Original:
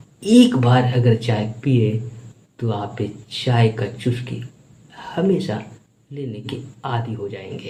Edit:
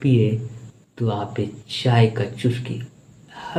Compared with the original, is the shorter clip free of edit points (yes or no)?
yes